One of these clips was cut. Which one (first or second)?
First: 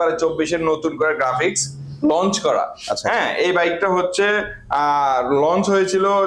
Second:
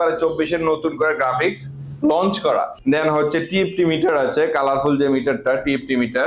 second